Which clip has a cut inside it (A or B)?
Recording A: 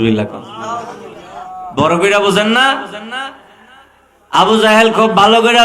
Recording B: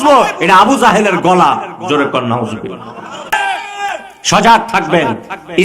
B